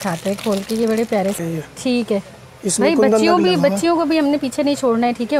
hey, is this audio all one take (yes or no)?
no